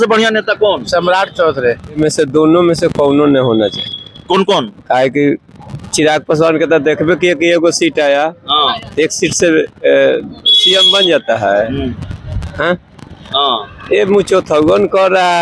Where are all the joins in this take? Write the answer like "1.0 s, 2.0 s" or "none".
2.0 s